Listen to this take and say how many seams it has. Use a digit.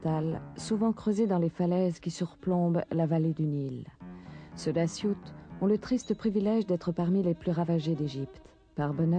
0